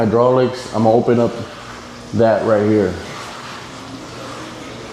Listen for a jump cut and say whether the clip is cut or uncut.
uncut